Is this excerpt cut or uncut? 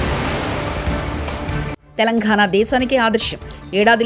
uncut